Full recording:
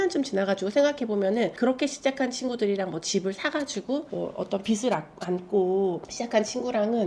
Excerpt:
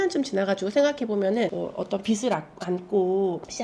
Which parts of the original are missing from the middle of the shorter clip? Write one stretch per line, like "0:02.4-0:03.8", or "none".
0:01.5-0:04.1